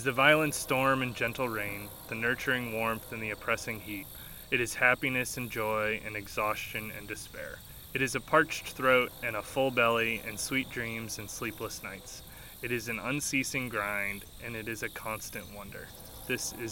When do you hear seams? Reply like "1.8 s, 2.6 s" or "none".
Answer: 7.7 s